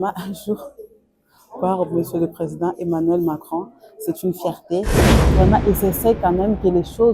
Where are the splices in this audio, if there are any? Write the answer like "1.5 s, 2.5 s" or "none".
5.1 s